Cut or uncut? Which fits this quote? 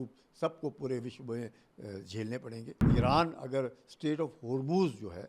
cut